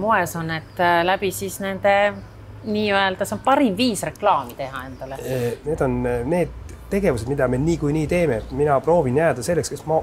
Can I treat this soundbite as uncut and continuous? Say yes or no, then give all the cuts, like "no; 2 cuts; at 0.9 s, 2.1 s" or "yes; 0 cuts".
no; 1 cut; at 5.6 s